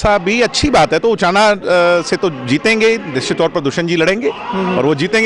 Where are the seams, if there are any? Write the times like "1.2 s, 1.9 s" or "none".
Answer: none